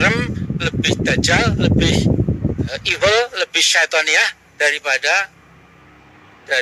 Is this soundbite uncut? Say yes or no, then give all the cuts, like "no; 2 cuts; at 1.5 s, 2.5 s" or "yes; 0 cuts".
yes; 0 cuts